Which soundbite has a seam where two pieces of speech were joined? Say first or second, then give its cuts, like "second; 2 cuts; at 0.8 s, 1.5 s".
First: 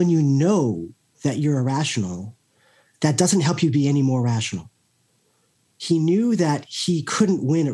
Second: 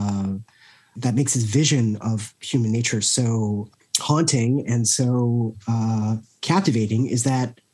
second; 3 cuts; at 1.0 s, 3.7 s, 6.3 s